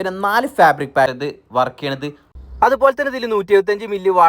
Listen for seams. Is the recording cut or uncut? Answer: cut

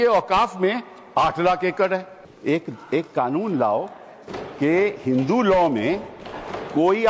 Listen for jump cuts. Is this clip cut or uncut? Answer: cut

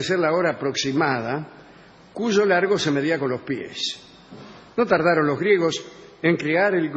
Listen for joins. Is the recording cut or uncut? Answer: cut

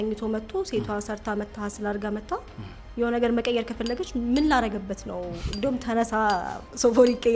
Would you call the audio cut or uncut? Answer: uncut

